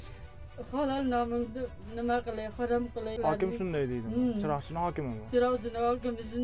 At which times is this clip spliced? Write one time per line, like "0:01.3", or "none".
0:03.2